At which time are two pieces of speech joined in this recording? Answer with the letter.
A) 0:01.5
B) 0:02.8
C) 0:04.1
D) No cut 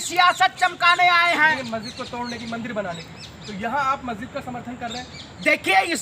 A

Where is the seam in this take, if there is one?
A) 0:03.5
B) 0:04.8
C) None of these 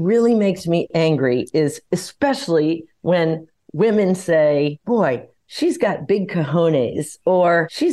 B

